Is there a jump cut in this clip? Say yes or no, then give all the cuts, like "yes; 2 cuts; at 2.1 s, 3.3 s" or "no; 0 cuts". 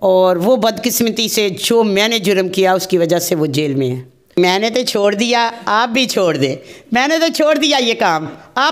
yes; 1 cut; at 4.4 s